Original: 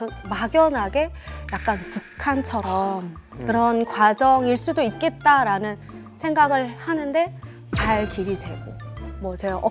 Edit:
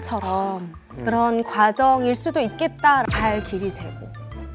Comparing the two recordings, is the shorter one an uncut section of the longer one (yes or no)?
no